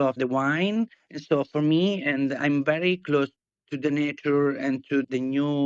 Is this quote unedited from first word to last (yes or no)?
yes